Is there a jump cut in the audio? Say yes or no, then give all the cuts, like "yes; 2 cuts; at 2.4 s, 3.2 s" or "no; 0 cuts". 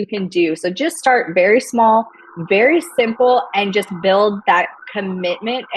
no; 0 cuts